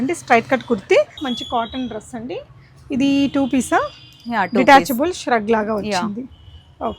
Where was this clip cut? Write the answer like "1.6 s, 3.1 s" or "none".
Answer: 1.2 s